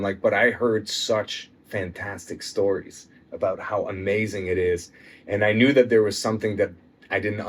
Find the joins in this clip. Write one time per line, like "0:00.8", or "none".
none

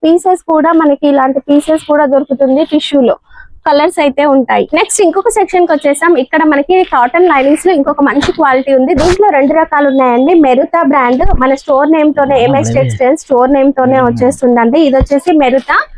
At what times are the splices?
0:04.7

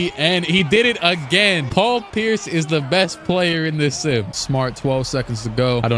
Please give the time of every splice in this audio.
0:04.3

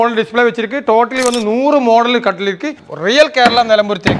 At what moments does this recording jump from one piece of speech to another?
0:02.7

